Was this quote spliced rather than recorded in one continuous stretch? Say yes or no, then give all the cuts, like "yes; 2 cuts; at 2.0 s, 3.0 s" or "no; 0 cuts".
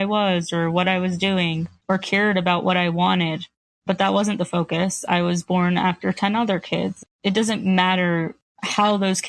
yes; 1 cut; at 7.0 s